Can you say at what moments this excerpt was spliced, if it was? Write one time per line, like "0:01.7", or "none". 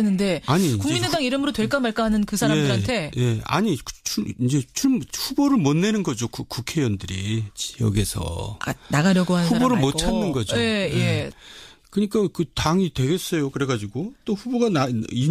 0:10.8